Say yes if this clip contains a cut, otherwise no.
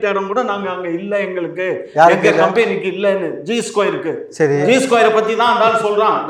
no